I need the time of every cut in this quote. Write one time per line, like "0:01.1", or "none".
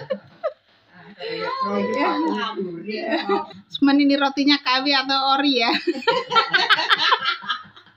0:03.6